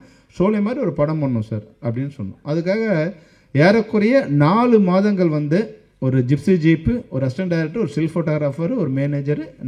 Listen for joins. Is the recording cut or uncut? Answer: uncut